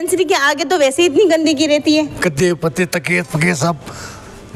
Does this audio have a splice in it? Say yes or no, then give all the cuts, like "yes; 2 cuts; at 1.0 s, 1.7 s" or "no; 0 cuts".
yes; 1 cut; at 2.1 s